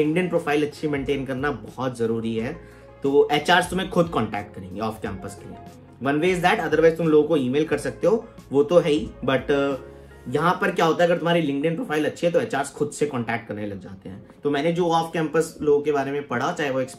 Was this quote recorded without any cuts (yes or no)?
yes